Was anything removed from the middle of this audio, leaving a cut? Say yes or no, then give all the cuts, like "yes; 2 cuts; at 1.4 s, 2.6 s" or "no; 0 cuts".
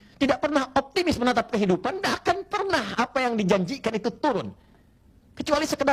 no; 0 cuts